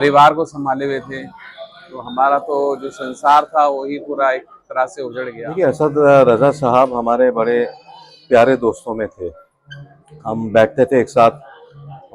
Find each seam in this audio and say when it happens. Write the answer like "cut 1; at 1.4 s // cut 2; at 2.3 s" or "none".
cut 1; at 5.4 s